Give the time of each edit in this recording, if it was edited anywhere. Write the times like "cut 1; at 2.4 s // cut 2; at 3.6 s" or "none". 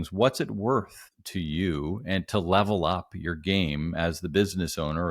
none